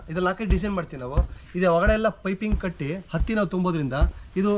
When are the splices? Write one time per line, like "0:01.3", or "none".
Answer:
none